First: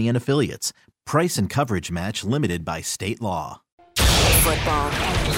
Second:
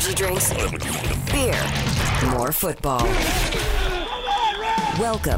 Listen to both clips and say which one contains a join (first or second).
first